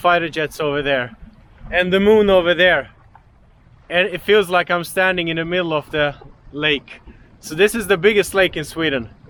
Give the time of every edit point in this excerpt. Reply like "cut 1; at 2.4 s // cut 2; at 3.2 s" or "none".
none